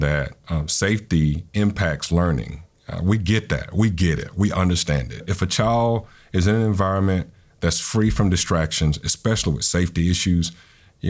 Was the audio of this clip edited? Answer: yes; 1 cut; at 5.2 s

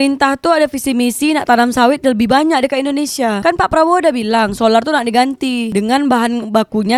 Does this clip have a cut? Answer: no; 0 cuts

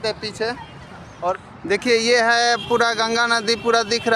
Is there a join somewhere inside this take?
yes; 1 cut; at 1.4 s

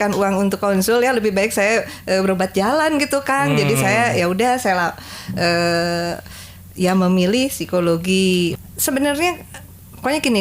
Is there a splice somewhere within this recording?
yes; 1 cut; at 8.6 s

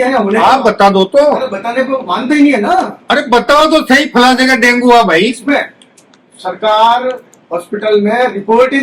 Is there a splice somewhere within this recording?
no; 0 cuts

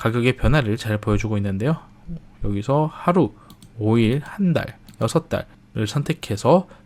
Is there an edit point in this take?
no; 0 cuts

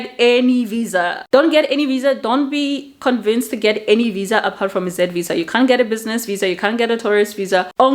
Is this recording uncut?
yes; 0 cuts

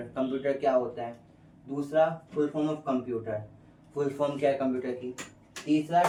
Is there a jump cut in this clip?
no; 0 cuts

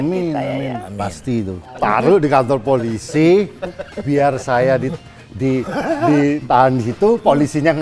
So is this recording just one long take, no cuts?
no; 1 cut; at 1.7 s

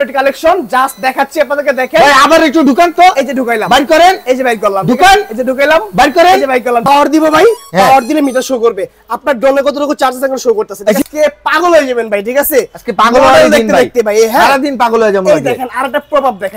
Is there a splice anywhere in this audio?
yes; 2 cuts; at 6.9 s, 11.0 s

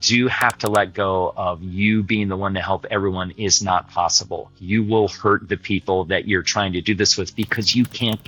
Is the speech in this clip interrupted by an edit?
no; 0 cuts

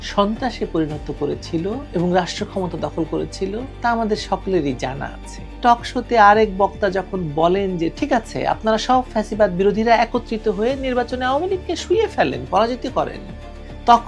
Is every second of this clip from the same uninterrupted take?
no; 1 cut; at 5.6 s

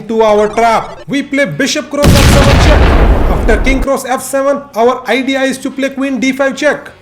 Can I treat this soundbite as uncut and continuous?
no; 1 cut; at 1.0 s

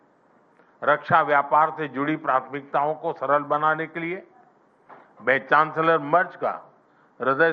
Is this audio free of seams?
yes; 0 cuts

